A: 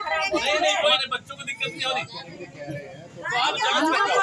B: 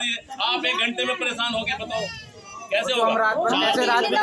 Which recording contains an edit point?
A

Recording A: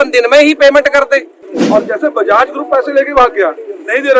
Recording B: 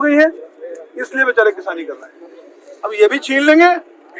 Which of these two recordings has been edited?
A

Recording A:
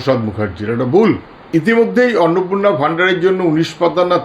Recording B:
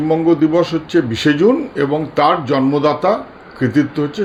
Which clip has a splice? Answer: A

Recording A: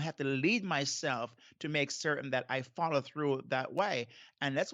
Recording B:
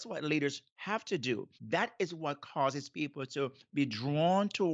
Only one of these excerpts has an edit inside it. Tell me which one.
B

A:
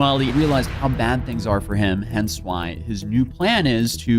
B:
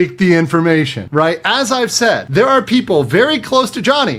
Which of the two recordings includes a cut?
B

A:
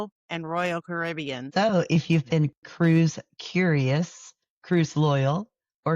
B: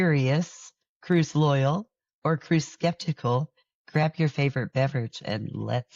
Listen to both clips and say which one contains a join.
A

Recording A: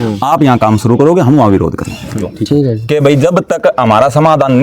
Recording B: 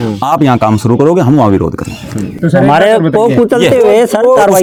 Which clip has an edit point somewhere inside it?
A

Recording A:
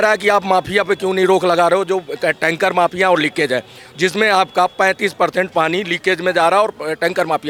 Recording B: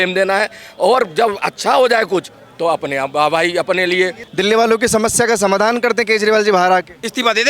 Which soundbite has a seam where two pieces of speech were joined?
B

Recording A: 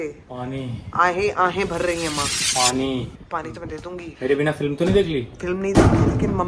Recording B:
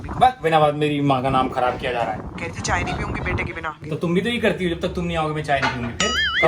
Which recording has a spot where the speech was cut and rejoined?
B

